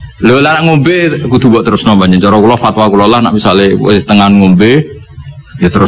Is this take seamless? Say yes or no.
yes